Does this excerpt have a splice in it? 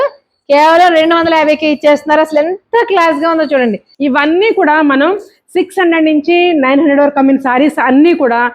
yes; 1 cut; at 3.9 s

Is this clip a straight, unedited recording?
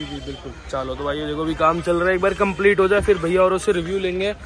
yes; 0 cuts

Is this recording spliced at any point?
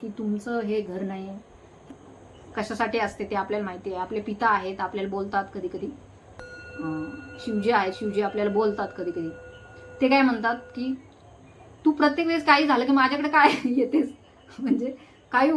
yes; 1 cut; at 1.9 s

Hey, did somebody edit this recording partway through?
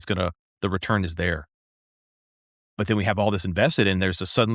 no; 0 cuts

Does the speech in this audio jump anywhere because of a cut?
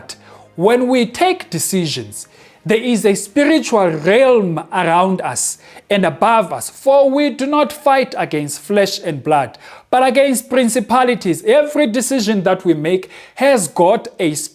no; 0 cuts

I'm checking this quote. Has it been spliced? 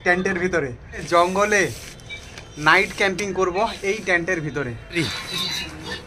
yes; 2 cuts; at 1.0 s, 5.0 s

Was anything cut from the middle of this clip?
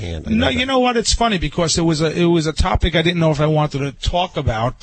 no; 0 cuts

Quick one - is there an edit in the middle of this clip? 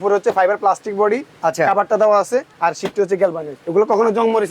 yes; 2 cuts; at 2.5 s, 3.5 s

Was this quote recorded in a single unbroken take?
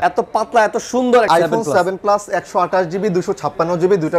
no; 1 cut; at 1.3 s

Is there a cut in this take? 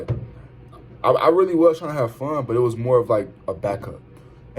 no; 0 cuts

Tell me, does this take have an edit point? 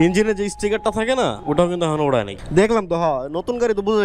yes; 2 cuts; at 1.4 s, 2.4 s

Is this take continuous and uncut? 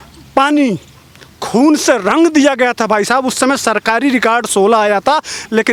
yes; 0 cuts

